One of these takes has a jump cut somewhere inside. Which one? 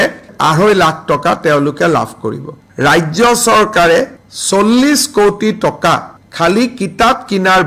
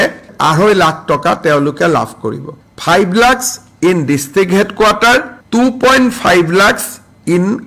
first; 1 cut; at 2.6 s

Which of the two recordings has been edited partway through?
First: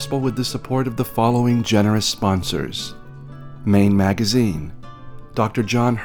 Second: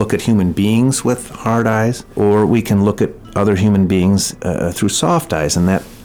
second; 2 cuts; at 2.0 s, 4.3 s

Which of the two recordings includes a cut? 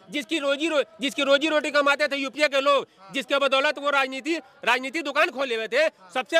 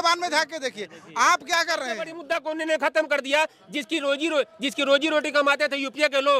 second; 1 cut; at 2.2 s

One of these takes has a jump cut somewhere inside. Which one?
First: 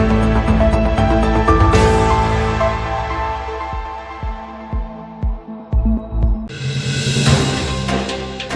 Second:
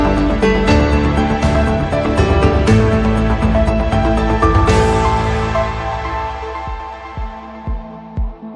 first; 1 cut; at 6.6 s

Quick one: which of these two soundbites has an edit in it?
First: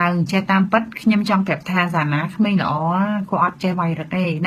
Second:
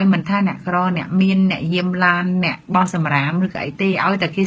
first; 1 cut; at 1.7 s

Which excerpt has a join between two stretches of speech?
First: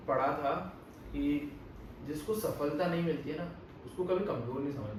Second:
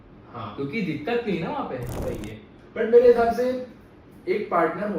second; 1 cut; at 2.6 s

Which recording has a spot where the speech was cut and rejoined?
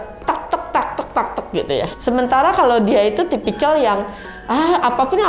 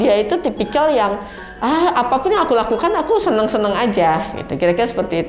first; 1 cut; at 1.9 s

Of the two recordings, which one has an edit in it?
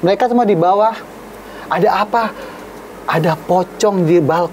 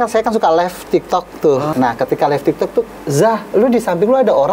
second; 2 cuts; at 1.7 s, 2.9 s

